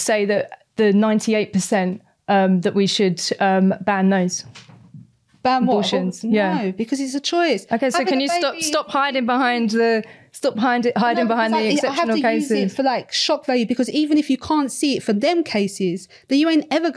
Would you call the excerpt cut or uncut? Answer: uncut